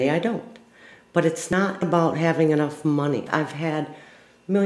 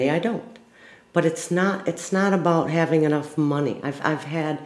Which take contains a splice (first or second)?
first